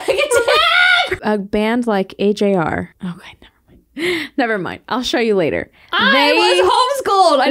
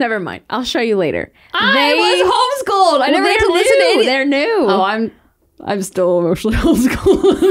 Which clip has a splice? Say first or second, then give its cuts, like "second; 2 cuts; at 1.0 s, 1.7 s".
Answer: first; 2 cuts; at 1.1 s, 2.9 s